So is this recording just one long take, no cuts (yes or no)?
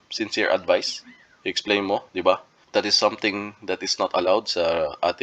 no